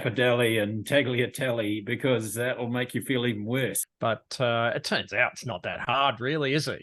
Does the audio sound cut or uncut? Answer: cut